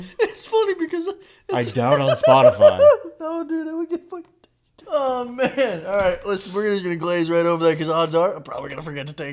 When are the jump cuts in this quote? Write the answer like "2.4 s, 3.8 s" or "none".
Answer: 4.7 s